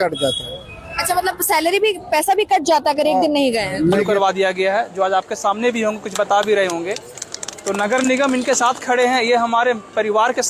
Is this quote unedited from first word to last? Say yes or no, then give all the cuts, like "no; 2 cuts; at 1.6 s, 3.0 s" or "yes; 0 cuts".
no; 1 cut; at 4.1 s